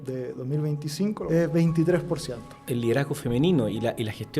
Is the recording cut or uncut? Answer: cut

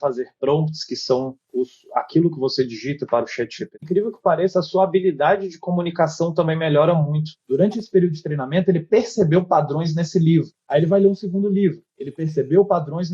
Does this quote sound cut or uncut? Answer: cut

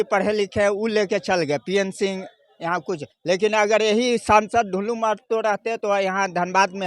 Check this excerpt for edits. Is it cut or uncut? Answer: uncut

